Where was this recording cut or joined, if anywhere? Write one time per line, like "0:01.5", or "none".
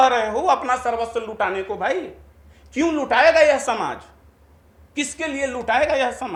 none